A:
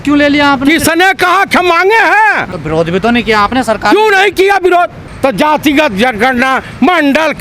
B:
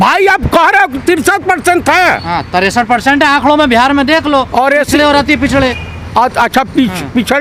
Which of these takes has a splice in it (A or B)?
A